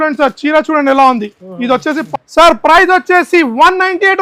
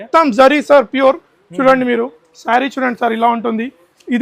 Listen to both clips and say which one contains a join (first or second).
first